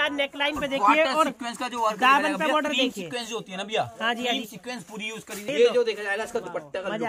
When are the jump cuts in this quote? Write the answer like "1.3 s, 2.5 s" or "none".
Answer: 5.5 s